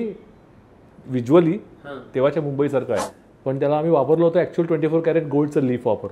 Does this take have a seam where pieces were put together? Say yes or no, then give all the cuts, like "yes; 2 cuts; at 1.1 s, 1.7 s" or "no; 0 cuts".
yes; 1 cut; at 3.1 s